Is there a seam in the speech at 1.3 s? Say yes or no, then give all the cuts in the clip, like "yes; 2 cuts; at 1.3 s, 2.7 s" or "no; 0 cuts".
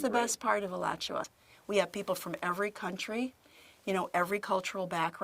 yes; 1 cut; at 1.3 s